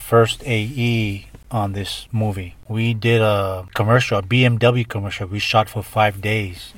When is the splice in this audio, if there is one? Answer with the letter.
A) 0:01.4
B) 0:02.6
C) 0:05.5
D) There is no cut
B